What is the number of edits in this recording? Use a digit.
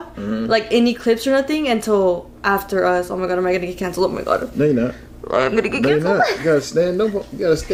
0